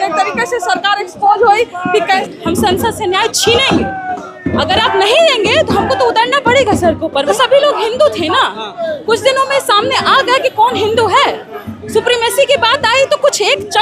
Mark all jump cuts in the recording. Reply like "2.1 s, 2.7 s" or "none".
2.2 s, 7.3 s